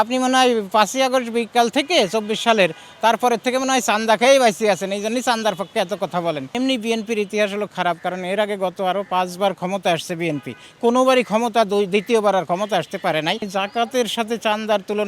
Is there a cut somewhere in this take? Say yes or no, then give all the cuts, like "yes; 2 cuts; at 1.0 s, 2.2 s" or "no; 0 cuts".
yes; 2 cuts; at 6.5 s, 13.5 s